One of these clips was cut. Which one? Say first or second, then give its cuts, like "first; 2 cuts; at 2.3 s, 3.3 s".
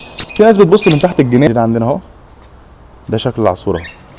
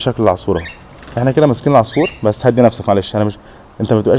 first; 1 cut; at 1.5 s